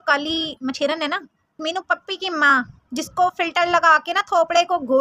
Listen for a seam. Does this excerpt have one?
no; 0 cuts

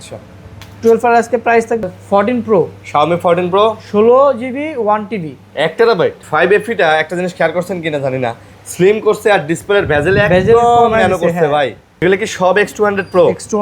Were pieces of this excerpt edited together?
yes; 3 cuts; at 1.8 s, 6.2 s, 12.0 s

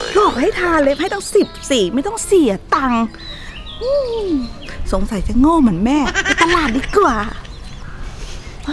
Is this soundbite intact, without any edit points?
yes; 0 cuts

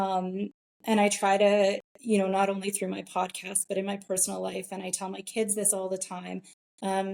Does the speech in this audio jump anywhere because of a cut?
no; 0 cuts

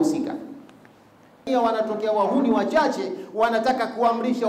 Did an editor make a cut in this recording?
yes; 1 cut; at 1.5 s

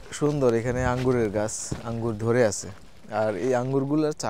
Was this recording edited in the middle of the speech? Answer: no; 0 cuts

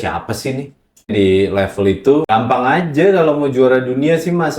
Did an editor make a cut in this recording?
yes; 2 cuts; at 0.9 s, 2.3 s

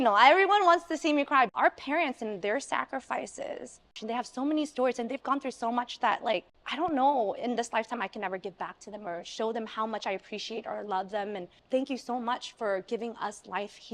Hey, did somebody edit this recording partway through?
yes; 4 cuts; at 1.5 s, 4.0 s, 6.6 s, 11.5 s

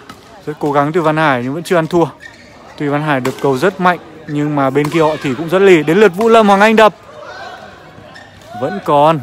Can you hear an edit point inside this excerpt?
no; 0 cuts

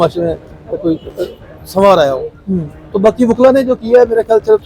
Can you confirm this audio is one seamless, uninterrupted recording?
yes; 0 cuts

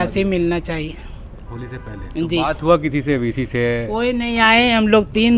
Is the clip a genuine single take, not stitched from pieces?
yes; 0 cuts

